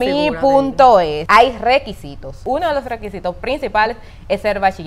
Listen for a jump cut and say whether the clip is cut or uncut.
cut